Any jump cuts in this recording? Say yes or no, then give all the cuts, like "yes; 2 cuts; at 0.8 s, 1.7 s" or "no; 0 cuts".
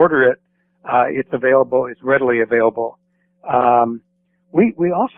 no; 0 cuts